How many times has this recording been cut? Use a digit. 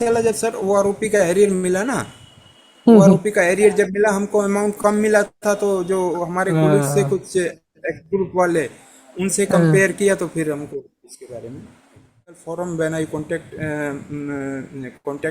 1